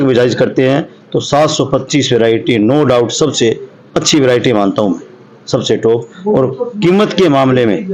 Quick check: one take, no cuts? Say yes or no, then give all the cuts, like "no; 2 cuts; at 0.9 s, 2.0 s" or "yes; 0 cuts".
yes; 0 cuts